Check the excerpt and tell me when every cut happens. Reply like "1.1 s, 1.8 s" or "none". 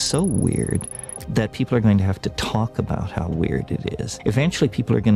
4.1 s